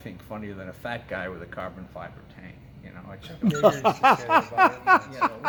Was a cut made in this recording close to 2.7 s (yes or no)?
no